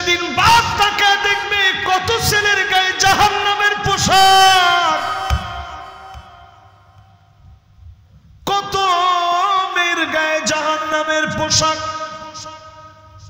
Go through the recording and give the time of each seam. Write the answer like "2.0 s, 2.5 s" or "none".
none